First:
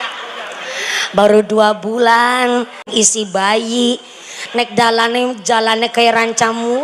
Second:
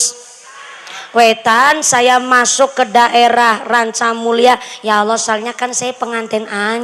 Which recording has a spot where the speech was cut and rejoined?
first; 1 cut; at 2.9 s

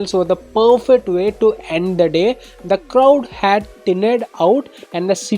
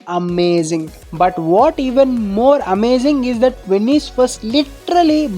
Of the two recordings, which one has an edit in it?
second; 1 cut; at 1.0 s

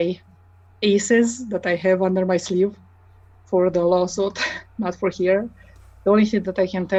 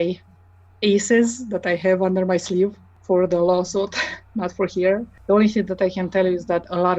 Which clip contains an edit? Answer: second; 2 cuts; at 2.9 s, 5.1 s

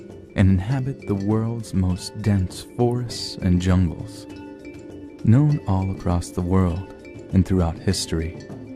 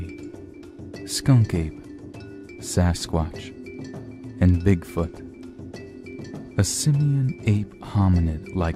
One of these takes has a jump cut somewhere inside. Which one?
first; 1 cut; at 5.4 s

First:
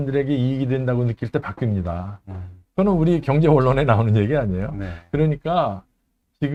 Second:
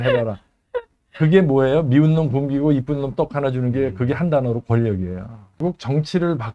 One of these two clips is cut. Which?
second; 1 cut; at 5.6 s

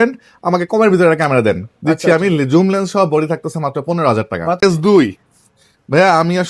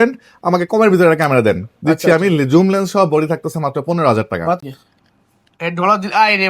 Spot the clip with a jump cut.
second; 1 cut; at 4.6 s

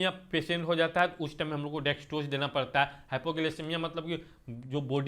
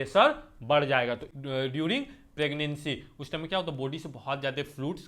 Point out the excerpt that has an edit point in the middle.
second; 1 cut; at 1.3 s

